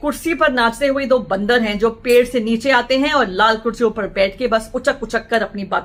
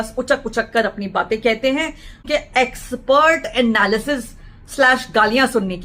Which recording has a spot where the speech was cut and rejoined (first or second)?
second